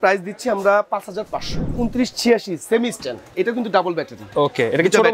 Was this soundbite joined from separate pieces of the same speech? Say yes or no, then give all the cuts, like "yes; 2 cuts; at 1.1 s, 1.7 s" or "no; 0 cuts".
yes; 2 cuts; at 1.7 s, 3.2 s